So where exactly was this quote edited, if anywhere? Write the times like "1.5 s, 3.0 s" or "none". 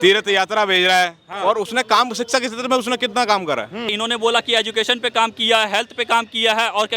1.3 s, 3.9 s